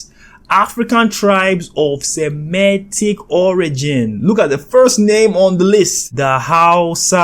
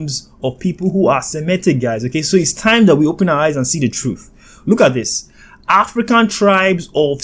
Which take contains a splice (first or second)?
first